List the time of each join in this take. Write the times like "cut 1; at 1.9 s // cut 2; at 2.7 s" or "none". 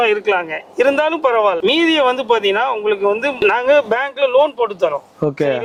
none